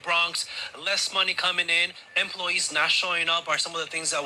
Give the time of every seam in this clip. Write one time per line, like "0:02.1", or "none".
none